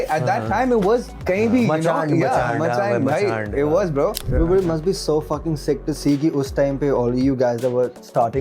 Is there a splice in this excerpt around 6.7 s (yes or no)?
no